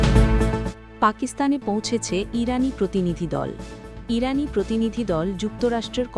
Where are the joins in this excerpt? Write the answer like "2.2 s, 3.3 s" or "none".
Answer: none